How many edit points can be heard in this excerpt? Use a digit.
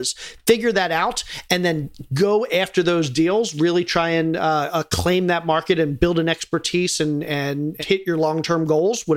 1